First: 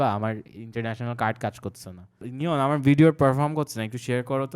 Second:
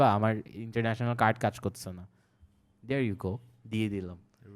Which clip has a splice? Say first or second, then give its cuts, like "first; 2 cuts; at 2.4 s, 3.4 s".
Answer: first; 1 cut; at 2.2 s